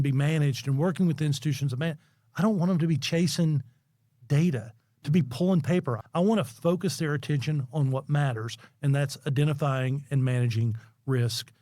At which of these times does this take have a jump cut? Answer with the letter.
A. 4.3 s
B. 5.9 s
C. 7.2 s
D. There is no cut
B